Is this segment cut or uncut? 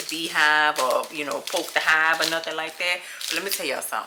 uncut